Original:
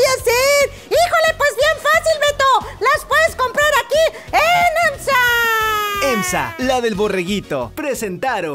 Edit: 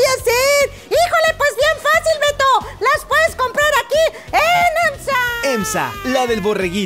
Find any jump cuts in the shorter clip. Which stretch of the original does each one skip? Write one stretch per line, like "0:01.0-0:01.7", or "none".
0:06.0-0:06.5